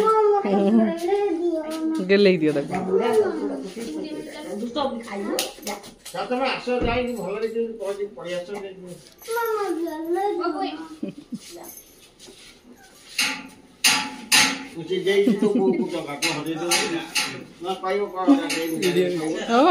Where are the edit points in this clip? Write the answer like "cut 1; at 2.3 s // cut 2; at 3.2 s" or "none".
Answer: none

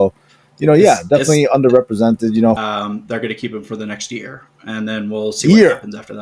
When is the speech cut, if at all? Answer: cut 1; at 2.6 s

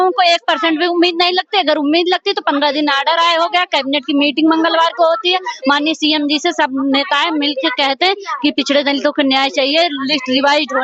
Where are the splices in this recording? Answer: none

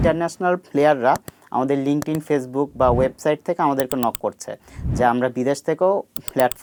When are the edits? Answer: none

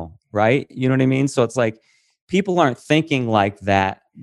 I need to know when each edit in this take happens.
none

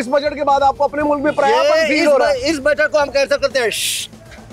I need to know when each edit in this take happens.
none

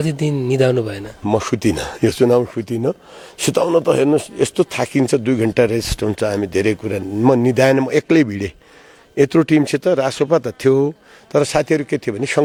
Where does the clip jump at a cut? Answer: none

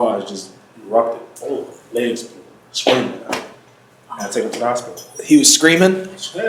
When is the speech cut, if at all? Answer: none

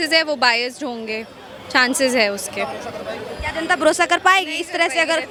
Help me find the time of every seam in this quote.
none

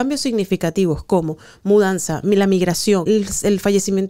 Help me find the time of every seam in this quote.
cut 1; at 3.0 s

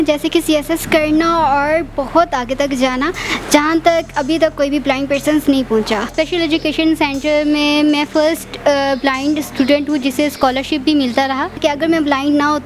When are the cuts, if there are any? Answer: cut 1; at 6.1 s // cut 2; at 11.6 s

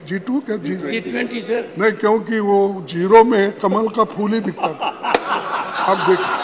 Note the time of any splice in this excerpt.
none

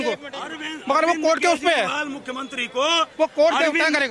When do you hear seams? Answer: none

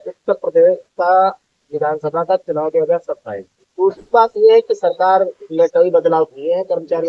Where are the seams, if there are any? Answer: cut 1; at 3.7 s

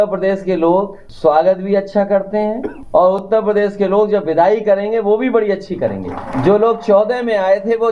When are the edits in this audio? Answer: cut 1; at 1.0 s // cut 2; at 2.7 s // cut 3; at 6.3 s

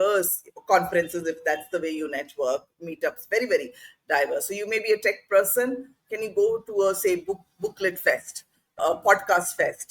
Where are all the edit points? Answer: cut 1; at 8.8 s

